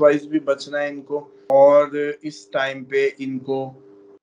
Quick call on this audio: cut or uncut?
cut